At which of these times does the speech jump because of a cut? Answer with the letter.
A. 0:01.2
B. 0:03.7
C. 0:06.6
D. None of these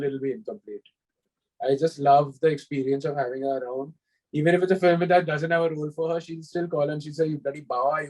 D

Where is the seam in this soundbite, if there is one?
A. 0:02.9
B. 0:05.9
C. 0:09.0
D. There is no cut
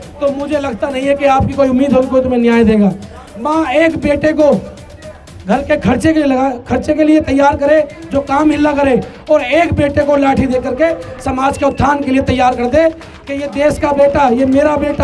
D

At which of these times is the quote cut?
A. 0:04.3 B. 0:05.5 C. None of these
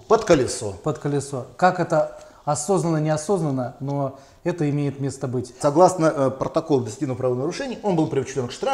B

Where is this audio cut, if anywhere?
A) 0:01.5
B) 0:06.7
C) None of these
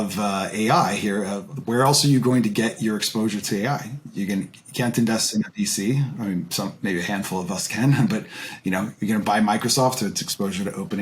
A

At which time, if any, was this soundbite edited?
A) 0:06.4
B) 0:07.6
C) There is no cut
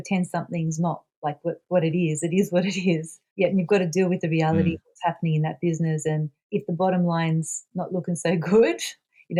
C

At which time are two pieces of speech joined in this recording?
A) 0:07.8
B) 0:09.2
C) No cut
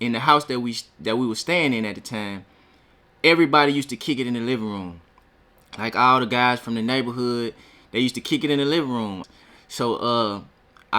B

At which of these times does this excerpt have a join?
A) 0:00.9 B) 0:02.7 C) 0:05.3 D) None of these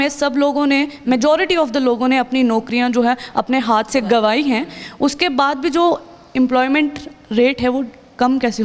D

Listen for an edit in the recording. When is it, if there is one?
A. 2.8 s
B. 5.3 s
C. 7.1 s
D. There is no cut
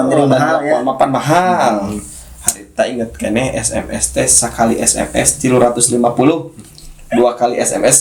D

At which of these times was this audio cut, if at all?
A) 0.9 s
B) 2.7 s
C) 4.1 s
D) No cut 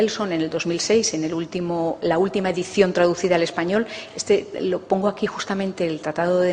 B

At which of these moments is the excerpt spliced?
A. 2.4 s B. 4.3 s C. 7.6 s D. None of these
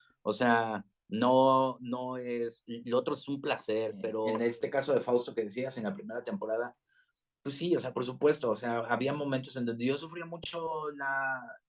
B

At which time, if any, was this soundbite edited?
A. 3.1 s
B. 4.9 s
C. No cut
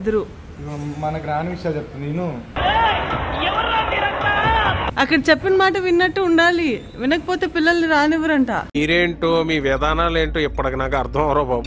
B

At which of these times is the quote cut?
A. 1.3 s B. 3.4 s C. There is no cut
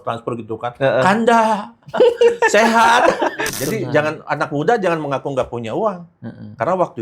B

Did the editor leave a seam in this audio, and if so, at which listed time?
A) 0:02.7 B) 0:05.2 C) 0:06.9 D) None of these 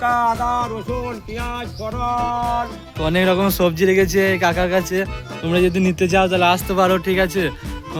D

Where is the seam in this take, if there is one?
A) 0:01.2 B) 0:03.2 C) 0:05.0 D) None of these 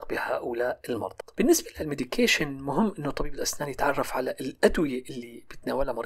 A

